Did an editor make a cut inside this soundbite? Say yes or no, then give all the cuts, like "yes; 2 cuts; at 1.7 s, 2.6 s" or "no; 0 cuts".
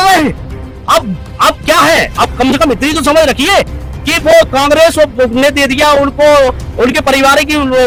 no; 0 cuts